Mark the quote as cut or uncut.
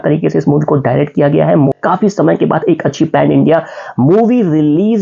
cut